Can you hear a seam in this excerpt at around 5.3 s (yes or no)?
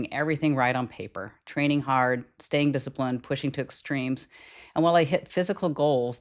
no